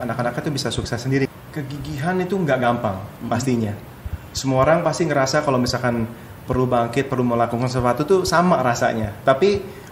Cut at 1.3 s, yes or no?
yes